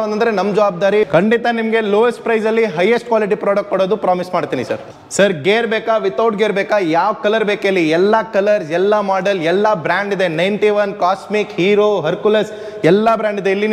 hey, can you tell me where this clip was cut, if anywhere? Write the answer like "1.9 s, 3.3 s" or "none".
1.1 s, 4.9 s